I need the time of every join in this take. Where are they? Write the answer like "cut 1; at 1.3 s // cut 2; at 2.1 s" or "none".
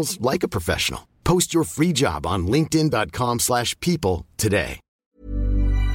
cut 1; at 5.0 s